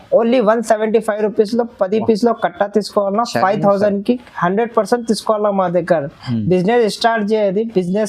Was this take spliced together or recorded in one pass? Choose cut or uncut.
uncut